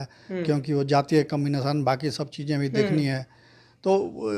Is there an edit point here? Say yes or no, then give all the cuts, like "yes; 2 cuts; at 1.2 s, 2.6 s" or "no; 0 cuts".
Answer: no; 0 cuts